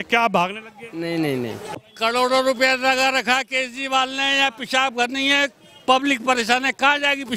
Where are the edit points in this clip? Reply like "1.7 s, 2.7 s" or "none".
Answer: 1.7 s